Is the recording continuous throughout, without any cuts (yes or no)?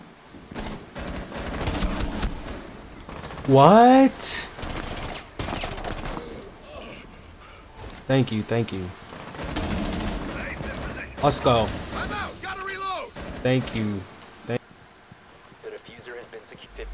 no